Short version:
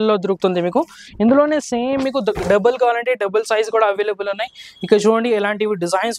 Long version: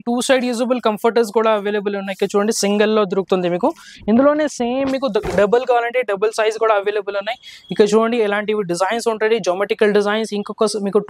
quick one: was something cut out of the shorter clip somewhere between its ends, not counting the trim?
no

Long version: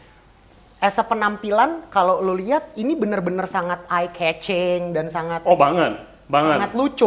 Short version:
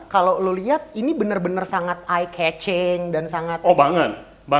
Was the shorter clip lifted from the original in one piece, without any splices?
yes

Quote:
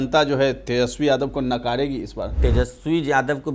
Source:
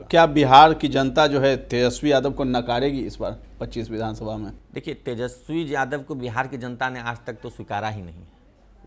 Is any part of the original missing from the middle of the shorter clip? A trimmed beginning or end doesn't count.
yes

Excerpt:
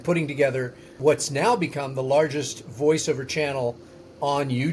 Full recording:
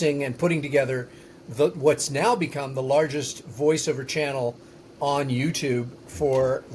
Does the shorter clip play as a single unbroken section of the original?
no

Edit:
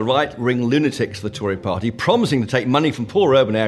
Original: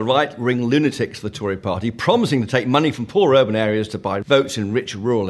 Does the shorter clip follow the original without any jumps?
yes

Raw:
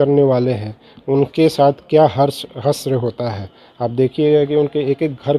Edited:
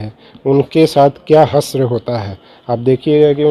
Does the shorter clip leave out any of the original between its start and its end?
yes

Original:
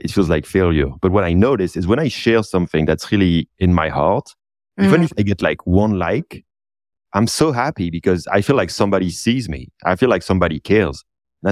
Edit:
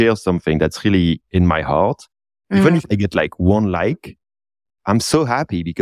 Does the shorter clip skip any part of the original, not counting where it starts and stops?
no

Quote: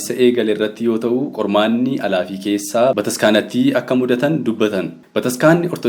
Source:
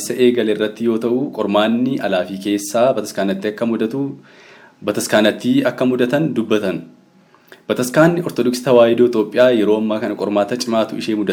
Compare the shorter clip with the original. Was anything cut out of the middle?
yes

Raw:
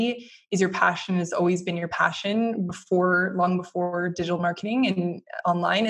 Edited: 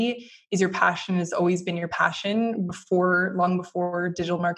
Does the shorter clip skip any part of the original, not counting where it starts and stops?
no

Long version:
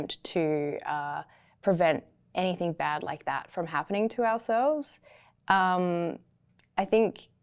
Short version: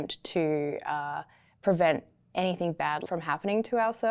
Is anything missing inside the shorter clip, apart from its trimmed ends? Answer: yes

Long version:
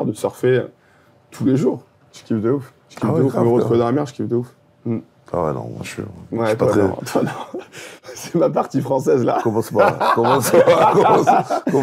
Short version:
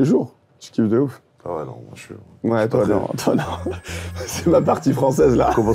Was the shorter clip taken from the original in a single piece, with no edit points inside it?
no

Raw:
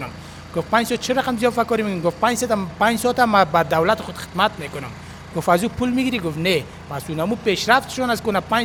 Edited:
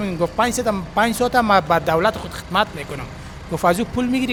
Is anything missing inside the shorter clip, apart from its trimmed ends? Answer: no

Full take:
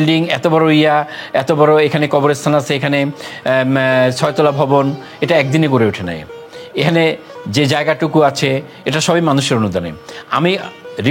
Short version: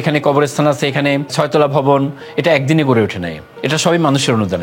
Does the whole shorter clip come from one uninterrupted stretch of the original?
no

